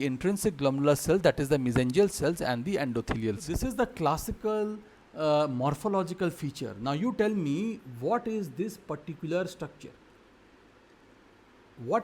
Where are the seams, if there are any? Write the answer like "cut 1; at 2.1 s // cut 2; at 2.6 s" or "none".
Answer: cut 1; at 3.5 s